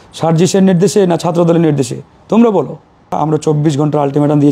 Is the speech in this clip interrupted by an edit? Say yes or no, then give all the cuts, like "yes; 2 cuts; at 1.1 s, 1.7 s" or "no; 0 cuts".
yes; 1 cut; at 3.1 s